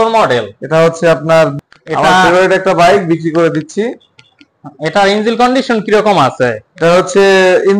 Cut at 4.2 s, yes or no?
no